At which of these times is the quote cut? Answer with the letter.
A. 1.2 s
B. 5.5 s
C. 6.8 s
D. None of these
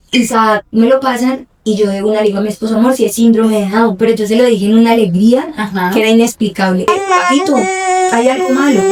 D